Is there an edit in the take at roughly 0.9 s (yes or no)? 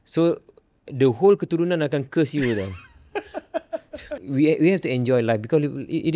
no